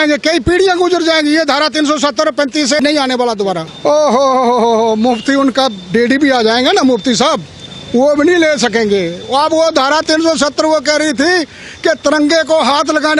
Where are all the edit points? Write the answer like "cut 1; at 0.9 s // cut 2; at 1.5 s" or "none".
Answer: cut 1; at 3.7 s